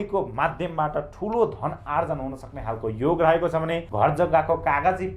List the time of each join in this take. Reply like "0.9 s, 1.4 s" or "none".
3.8 s